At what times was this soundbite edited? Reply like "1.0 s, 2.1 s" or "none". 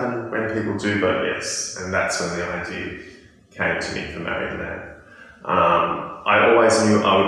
none